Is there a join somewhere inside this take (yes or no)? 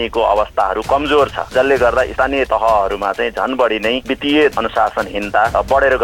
yes